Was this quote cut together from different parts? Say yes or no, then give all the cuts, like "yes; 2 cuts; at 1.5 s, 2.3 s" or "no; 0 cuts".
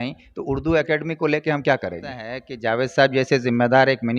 yes; 1 cut; at 2.5 s